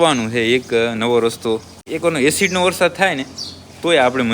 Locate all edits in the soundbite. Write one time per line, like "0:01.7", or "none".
0:01.8